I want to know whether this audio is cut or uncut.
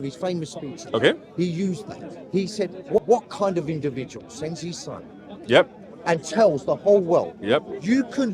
cut